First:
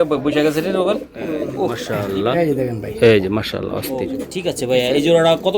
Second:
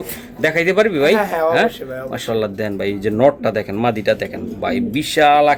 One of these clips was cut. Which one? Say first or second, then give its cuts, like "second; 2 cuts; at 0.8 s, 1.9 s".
first; 2 cuts; at 1.8 s, 4.3 s